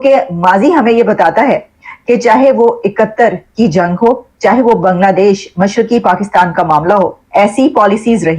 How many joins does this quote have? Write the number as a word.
one